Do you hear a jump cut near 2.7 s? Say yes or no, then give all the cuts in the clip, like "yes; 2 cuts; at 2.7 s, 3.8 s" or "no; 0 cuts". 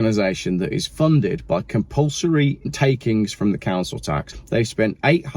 yes; 3 cuts; at 0.9 s, 2.7 s, 4.3 s